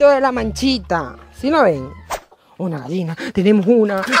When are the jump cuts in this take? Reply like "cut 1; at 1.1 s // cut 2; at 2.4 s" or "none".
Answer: cut 1; at 2.2 s